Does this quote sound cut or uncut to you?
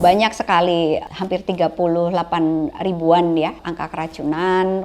cut